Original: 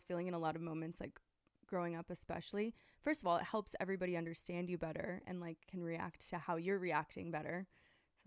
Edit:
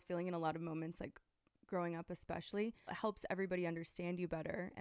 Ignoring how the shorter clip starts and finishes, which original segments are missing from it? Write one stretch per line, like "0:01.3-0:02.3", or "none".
0:03.0-0:03.5